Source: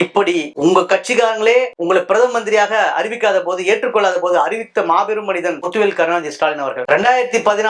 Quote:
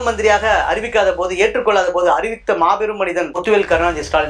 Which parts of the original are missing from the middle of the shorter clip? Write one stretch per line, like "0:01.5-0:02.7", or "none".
none